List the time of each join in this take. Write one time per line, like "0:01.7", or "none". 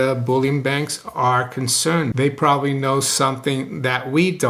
0:02.1

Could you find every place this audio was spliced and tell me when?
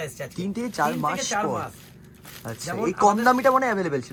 none

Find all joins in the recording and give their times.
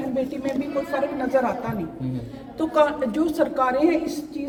none

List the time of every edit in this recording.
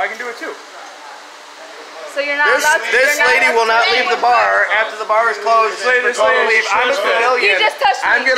0:01.4
0:05.8

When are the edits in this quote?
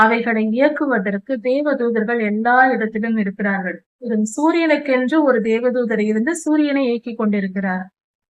0:04.1

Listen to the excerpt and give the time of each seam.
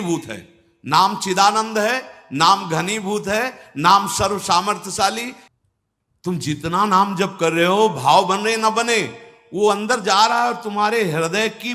0:05.4

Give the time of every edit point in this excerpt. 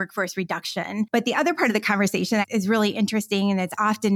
0:01.1

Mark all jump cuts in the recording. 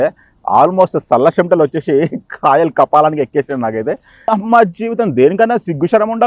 0:04.2

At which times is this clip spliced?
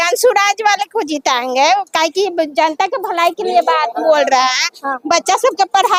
none

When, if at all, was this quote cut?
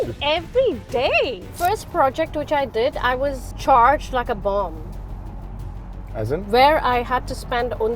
0:01.5
0:03.5

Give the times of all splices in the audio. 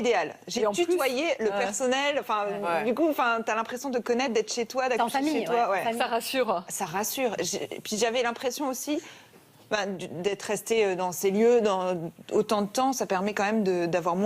0:02.0

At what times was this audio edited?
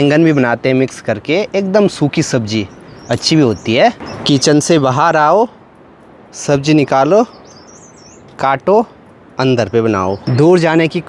none

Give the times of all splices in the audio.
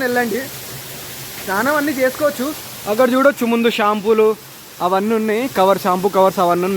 none

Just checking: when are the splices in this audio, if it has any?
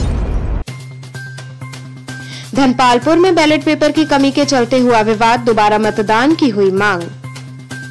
none

